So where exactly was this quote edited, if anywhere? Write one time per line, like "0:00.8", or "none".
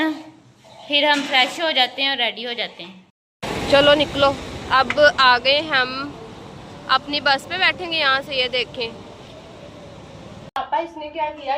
0:03.2
0:10.6